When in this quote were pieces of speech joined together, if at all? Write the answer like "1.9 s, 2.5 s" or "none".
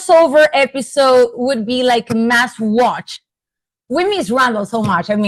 none